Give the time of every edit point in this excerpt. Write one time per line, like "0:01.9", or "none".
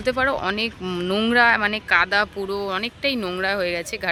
none